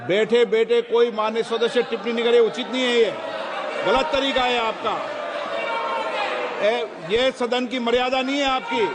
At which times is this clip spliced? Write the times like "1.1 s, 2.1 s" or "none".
none

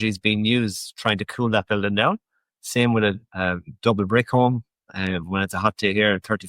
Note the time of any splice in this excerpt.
3.3 s

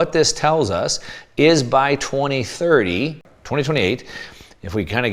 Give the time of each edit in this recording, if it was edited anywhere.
3.2 s

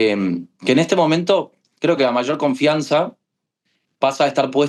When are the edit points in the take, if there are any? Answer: none

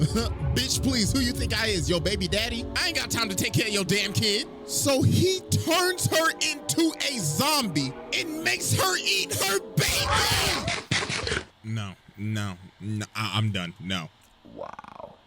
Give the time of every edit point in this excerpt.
14.2 s

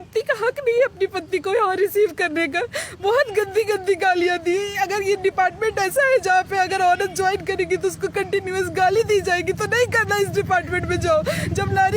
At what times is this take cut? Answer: none

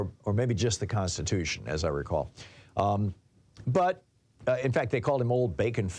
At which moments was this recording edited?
none

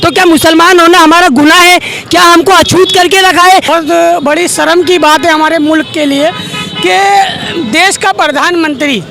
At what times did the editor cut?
3.7 s

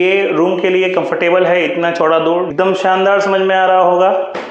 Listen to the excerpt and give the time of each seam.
2.5 s

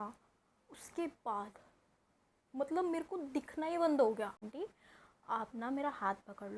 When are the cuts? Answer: 4.5 s

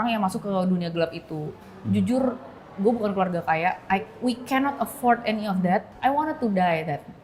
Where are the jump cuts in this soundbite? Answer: 5.9 s

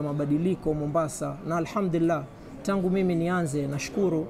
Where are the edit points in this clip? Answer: none

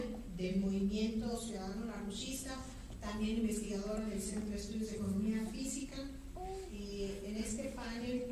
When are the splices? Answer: none

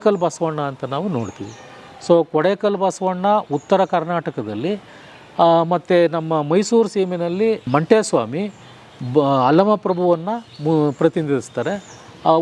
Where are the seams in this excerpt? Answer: none

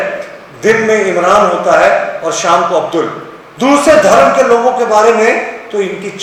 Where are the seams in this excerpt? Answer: none

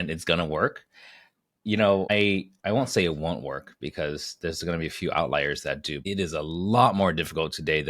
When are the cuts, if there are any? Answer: 2.1 s, 6.0 s

